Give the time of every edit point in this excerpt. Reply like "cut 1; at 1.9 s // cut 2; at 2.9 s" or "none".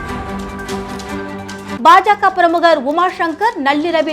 cut 1; at 1.8 s